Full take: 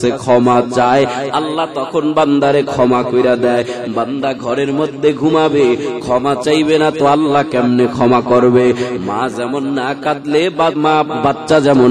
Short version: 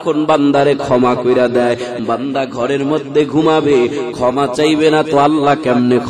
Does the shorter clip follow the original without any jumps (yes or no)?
yes